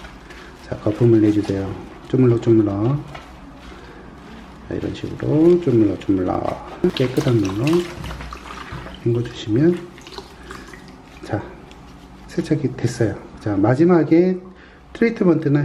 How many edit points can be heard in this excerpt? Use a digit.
1